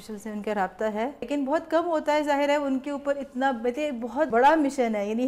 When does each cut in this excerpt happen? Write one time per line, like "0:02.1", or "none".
0:01.3
0:04.3